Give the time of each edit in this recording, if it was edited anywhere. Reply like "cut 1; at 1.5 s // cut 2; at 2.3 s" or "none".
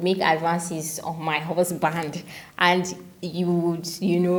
none